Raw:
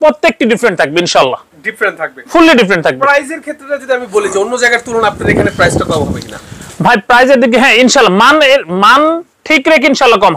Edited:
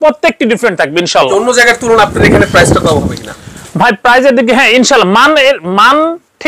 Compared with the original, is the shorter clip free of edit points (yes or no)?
no